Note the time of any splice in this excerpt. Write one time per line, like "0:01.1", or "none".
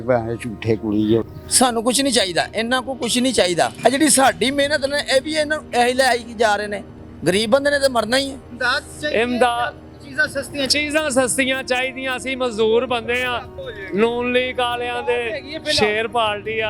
0:01.4
0:08.5

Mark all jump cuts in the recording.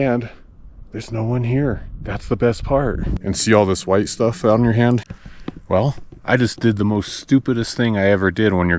0:03.1
0:05.0

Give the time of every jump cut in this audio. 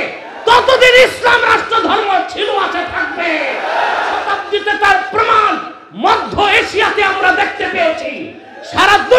0:04.2

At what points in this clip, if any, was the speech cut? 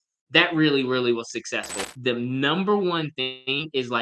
0:01.9

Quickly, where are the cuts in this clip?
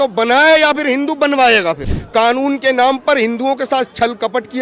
0:02.0

